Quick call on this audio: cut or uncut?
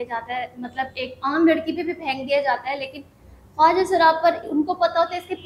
uncut